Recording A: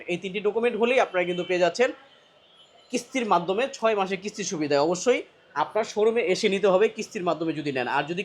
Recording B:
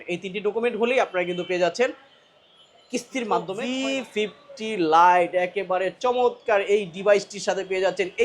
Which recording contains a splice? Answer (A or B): B